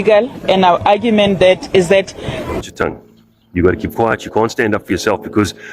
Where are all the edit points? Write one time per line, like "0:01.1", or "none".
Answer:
0:02.6